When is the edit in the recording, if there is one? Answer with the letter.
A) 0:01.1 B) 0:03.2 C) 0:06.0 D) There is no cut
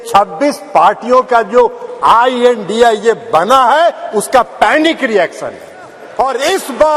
C